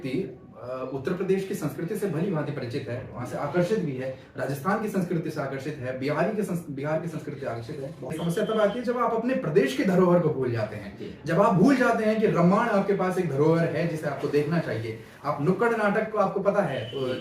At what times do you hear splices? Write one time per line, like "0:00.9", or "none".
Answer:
0:08.1